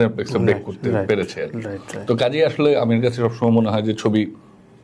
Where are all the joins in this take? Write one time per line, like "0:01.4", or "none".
none